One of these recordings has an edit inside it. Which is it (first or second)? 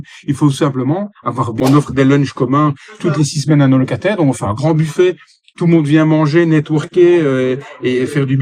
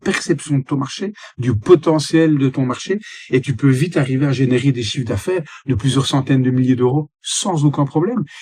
first